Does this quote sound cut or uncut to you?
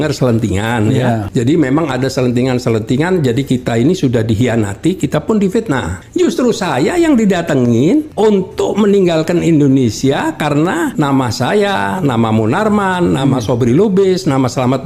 cut